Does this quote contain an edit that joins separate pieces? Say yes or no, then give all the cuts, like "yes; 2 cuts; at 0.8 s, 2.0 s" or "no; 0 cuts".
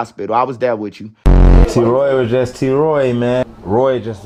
no; 0 cuts